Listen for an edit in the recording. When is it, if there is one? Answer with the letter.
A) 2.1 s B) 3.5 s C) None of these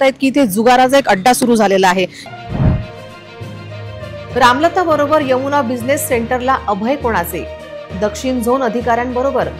A